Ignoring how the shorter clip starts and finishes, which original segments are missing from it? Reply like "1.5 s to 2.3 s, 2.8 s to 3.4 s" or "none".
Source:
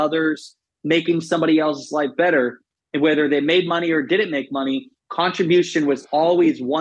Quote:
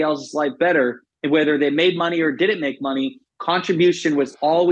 2.7 s to 2.8 s